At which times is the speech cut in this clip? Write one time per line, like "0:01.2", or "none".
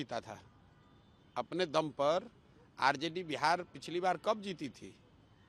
none